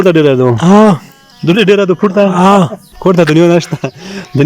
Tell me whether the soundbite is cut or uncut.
cut